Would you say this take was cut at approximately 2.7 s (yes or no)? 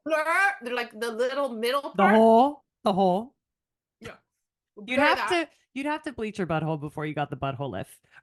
no